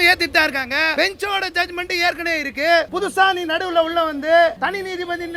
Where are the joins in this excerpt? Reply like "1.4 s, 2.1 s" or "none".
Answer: 0.9 s, 2.9 s, 4.6 s